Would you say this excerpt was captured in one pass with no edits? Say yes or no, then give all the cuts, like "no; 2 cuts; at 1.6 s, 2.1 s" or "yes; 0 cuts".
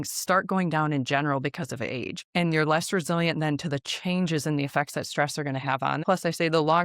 no; 2 cuts; at 2.2 s, 6.0 s